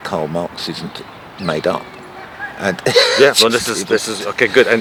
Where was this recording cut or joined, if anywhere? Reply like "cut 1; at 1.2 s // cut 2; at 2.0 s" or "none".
none